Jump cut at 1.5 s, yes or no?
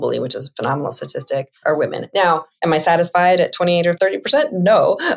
yes